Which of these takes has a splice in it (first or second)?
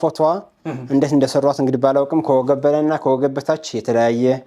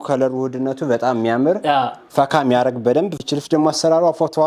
second